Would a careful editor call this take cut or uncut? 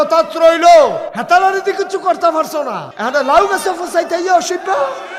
cut